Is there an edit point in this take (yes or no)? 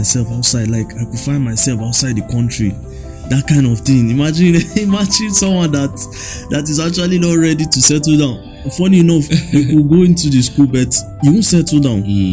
no